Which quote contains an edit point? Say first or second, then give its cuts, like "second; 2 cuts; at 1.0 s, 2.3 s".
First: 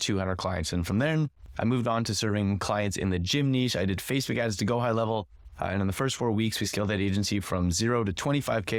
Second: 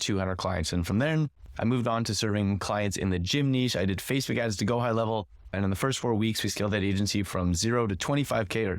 second; 1 cut; at 5.5 s